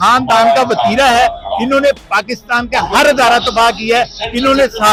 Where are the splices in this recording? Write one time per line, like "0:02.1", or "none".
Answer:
none